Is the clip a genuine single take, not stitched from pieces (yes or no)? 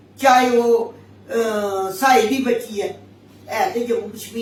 yes